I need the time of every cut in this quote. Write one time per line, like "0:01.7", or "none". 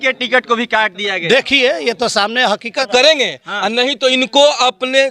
0:02.9